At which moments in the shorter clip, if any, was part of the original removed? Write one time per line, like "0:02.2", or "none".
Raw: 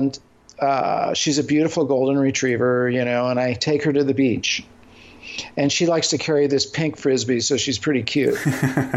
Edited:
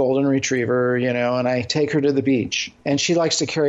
0:02.7